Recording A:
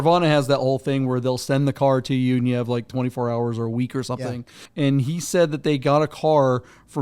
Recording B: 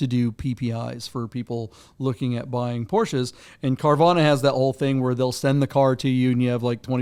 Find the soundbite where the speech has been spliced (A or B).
A